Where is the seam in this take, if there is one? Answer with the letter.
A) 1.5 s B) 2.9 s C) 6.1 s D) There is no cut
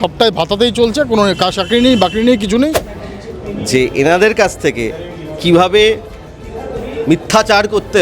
B